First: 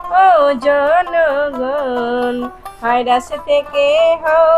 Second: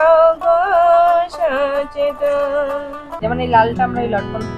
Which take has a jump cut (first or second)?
second